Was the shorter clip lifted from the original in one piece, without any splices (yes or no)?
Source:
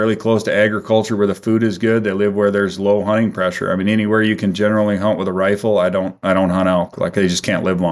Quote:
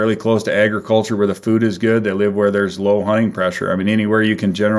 yes